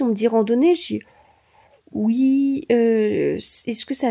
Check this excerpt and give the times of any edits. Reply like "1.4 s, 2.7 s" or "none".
none